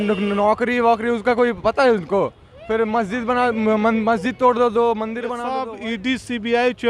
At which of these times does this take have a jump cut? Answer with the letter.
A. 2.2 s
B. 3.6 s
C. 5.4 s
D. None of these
C